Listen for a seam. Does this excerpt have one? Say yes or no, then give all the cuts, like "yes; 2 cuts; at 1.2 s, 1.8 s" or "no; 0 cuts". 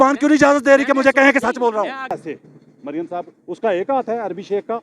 yes; 1 cut; at 2.2 s